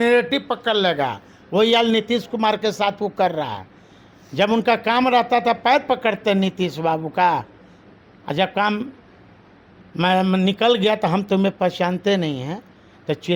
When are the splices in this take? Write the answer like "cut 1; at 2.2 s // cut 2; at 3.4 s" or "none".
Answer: none